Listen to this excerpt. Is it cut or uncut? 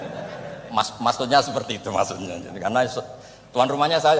uncut